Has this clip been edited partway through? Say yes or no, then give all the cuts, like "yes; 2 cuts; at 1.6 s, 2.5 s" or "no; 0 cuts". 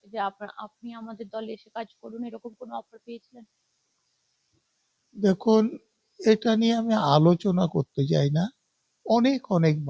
no; 0 cuts